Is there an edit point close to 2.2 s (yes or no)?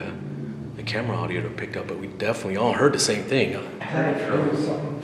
no